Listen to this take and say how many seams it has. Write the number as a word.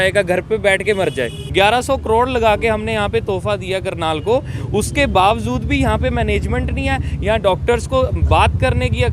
one